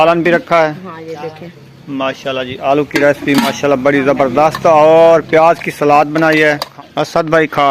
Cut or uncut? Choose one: cut